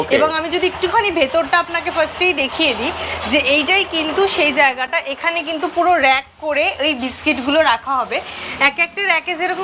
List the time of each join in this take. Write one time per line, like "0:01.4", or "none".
none